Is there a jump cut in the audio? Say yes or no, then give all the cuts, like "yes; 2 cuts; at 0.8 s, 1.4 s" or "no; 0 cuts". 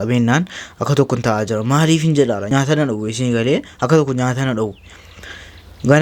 yes; 1 cut; at 2.5 s